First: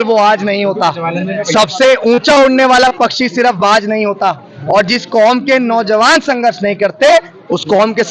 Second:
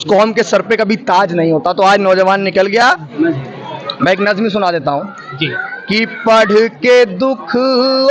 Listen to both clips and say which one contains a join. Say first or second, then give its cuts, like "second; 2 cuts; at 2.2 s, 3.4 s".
second; 1 cut; at 3.1 s